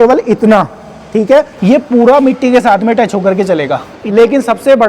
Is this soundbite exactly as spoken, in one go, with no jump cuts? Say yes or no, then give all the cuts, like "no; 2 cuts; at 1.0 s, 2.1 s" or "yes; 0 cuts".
no; 2 cuts; at 1.5 s, 4.0 s